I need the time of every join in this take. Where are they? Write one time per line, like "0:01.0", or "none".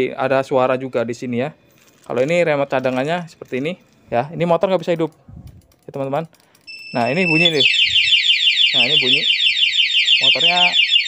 0:03.9

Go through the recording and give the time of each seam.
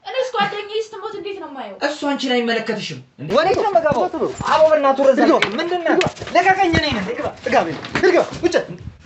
0:03.2

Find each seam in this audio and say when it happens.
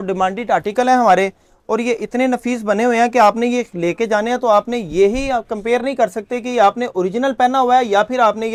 none

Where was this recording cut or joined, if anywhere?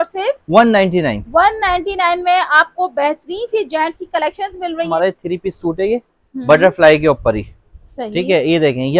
0:04.9

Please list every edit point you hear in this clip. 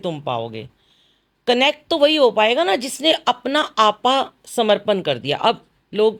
none

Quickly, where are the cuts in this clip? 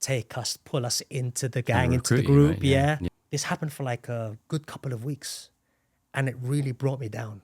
0:03.1

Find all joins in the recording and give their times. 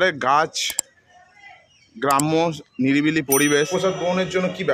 0:03.6

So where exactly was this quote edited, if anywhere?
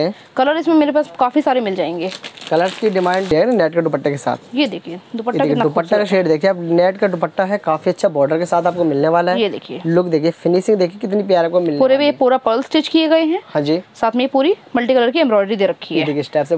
0:03.3

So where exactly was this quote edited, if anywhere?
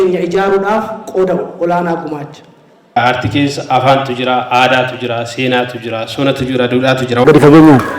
0:03.0
0:07.2

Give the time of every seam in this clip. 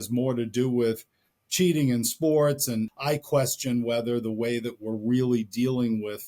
0:02.9

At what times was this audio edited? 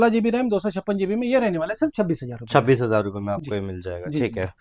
none

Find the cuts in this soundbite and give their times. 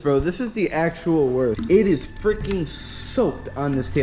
0:01.6

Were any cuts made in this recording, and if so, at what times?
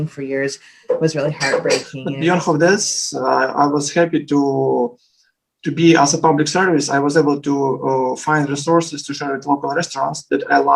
0:02.0

